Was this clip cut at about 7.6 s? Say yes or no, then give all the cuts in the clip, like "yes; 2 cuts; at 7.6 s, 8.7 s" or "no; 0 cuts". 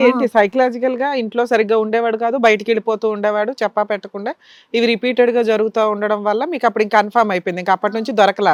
no; 0 cuts